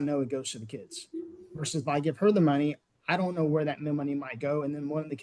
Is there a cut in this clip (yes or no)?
no